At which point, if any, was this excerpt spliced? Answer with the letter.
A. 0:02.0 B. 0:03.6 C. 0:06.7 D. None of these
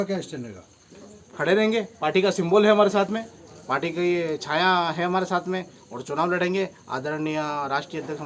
D